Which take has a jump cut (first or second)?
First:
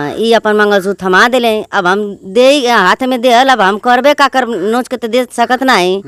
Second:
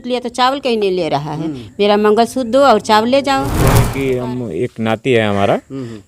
second